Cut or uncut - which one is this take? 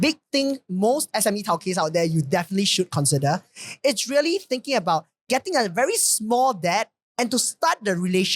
cut